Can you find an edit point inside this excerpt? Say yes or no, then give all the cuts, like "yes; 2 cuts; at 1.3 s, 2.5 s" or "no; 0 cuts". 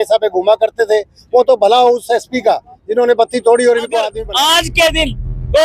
yes; 1 cut; at 4.1 s